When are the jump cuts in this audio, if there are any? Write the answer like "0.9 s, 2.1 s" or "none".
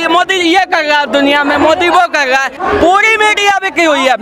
2.5 s